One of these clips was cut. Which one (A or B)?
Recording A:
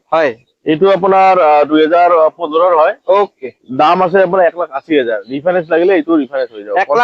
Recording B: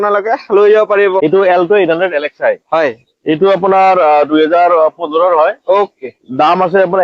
B